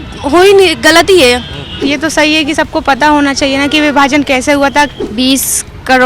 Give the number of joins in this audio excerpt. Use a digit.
2